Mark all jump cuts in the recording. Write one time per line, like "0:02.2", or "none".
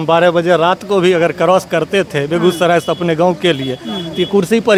none